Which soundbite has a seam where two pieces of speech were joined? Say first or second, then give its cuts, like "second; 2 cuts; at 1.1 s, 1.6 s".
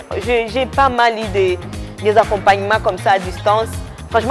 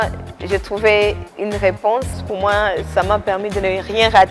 second; 2 cuts; at 1.3 s, 2.3 s